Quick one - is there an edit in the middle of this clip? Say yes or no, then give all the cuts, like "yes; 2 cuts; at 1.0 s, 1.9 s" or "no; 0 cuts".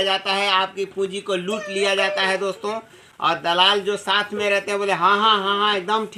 no; 0 cuts